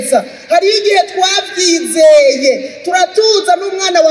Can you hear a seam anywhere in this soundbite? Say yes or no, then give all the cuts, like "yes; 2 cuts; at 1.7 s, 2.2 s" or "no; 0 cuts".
no; 0 cuts